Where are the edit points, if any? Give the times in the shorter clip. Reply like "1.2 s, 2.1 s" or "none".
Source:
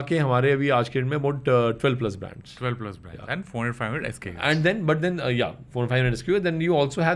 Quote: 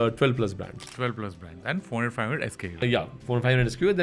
2.8 s